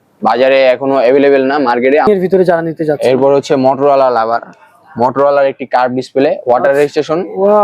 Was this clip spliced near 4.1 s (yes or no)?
no